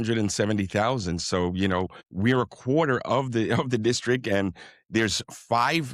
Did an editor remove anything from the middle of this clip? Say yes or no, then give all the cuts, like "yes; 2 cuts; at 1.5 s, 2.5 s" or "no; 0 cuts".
yes; 1 cut; at 2.0 s